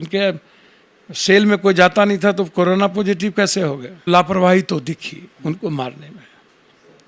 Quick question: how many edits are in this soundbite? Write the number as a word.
one